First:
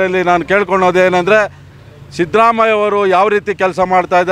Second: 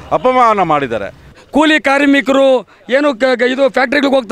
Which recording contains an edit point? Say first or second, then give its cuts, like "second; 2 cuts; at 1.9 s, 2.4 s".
second; 1 cut; at 1.4 s